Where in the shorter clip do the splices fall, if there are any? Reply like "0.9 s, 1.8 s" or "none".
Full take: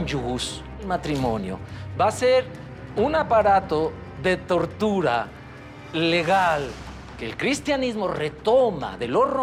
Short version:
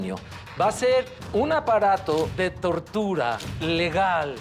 1.2 s, 2.3 s, 3.5 s